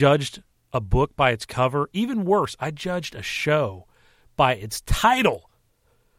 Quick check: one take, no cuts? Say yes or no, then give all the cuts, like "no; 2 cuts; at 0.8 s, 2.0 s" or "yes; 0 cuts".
yes; 0 cuts